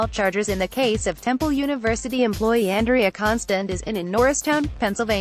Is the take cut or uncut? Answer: cut